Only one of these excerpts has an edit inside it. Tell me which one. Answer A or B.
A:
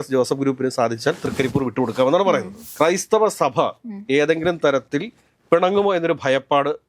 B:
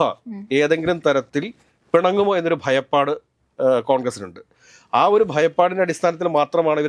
A